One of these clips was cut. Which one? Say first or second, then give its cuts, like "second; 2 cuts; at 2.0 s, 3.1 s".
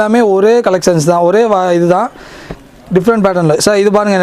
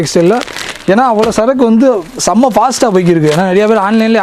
first; 1 cut; at 2.6 s